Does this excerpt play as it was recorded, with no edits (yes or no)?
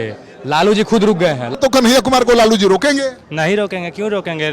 no